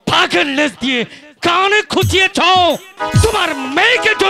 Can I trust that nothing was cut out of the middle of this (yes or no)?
no